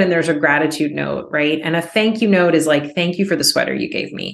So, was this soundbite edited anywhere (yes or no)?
no